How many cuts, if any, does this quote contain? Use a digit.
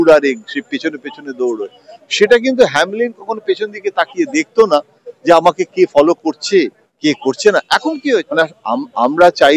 1